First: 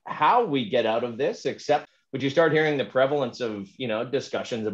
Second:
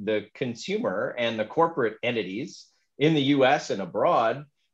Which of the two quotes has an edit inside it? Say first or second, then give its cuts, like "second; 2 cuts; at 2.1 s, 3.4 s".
first; 1 cut; at 1.9 s